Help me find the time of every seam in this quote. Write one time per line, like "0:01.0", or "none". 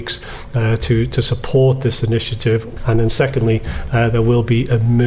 0:02.7

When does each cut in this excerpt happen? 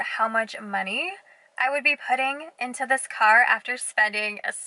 none

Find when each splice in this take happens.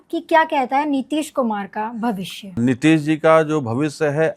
0:02.6

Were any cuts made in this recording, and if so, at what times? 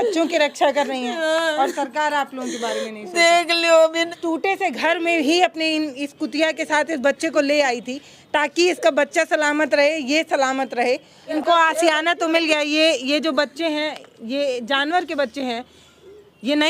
0:04.1
0:11.2

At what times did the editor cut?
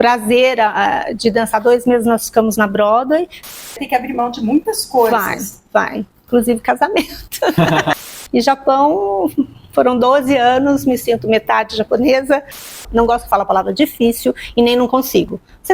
0:03.4
0:08.0
0:12.7

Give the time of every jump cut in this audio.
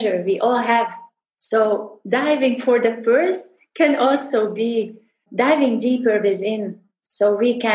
none

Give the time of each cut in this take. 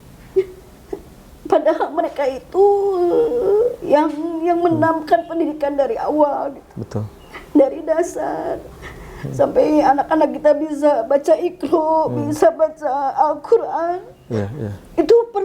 none

